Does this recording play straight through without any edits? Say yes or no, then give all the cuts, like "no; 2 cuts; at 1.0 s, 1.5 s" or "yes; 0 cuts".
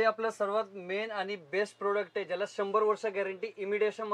yes; 0 cuts